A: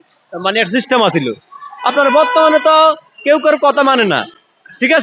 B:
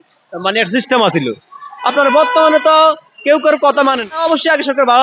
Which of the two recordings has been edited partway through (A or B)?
B